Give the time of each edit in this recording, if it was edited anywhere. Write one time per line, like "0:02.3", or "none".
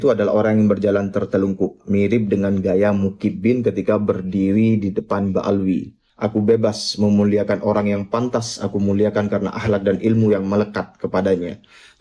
0:06.0